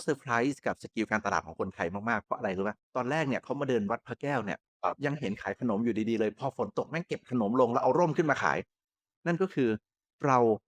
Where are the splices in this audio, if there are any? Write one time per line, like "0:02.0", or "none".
0:02.8
0:09.1